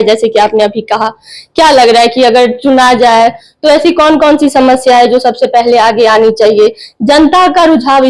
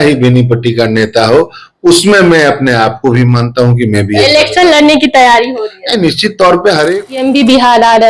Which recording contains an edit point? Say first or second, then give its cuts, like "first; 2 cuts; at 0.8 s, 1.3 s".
second; 1 cut; at 7.1 s